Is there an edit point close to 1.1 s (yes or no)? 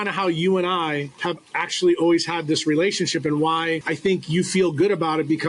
yes